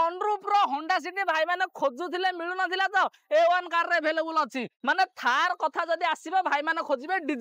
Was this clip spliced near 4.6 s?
yes; 1 cut; at 4.6 s

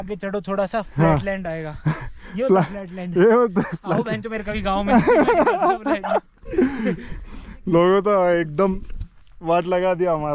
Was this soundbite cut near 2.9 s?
no; 0 cuts

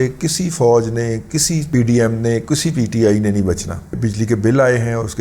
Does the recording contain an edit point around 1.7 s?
no; 1 cut; at 3.9 s

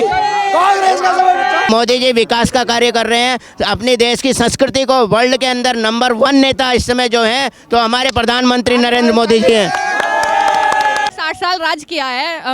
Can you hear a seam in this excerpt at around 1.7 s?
yes; 2 cuts; at 1.7 s, 11.2 s

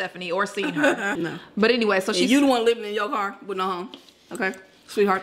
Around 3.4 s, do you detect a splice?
no; 1 cut; at 1.1 s

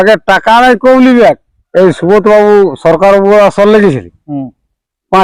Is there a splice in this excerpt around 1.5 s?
yes; 1 cut; at 1.5 s

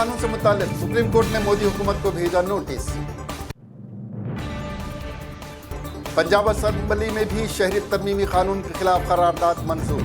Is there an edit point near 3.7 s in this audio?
yes; 2 cuts; at 3.7 s, 5.7 s

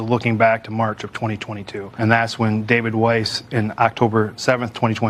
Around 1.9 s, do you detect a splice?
no; 0 cuts

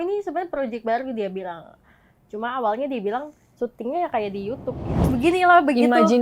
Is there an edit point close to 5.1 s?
yes; 1 cut; at 5.1 s

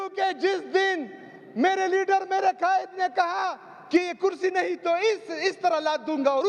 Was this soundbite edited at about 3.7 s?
no; 0 cuts

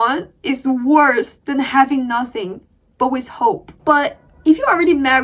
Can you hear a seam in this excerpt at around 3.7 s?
yes; 1 cut; at 3.7 s

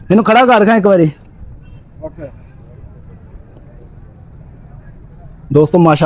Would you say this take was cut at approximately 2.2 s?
no; 0 cuts

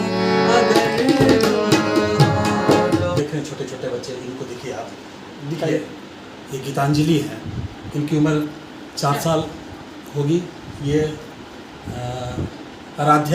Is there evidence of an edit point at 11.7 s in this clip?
no; 1 cut; at 3.1 s

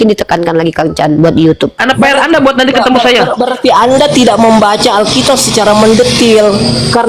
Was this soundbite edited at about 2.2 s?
yes; 1 cut; at 2.2 s

